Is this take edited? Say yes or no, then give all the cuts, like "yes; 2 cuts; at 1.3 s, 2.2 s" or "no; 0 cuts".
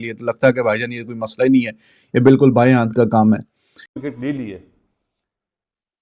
yes; 1 cut; at 3.9 s